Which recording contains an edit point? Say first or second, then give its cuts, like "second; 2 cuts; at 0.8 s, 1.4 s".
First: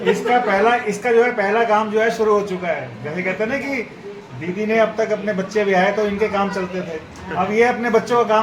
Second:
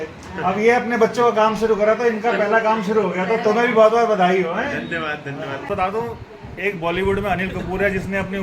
second; 1 cut; at 5.7 s